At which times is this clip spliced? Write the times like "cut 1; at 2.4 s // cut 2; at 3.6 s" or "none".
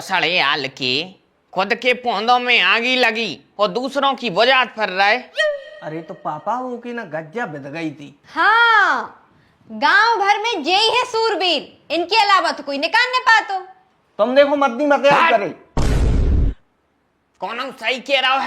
none